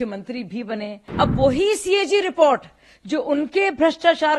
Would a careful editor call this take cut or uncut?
cut